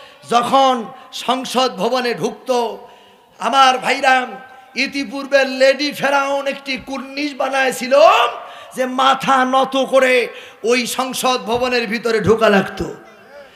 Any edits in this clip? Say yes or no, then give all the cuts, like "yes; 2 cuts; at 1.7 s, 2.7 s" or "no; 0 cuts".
no; 0 cuts